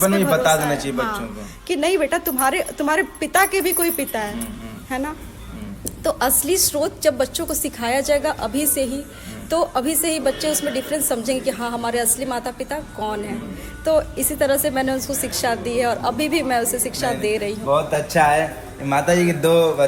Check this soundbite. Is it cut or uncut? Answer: uncut